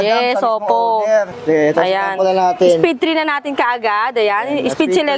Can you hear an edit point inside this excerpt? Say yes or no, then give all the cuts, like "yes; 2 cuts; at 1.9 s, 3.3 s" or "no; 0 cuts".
yes; 1 cut; at 1.3 s